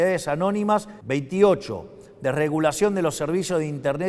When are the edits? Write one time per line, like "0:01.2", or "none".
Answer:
0:00.9